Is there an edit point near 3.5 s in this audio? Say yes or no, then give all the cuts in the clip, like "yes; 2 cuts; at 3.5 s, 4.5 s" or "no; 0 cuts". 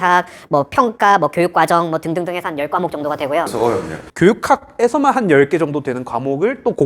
no; 0 cuts